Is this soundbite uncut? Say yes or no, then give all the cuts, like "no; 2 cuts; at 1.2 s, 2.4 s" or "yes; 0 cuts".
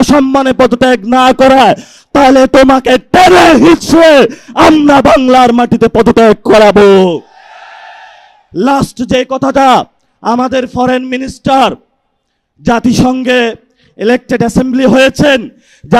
yes; 0 cuts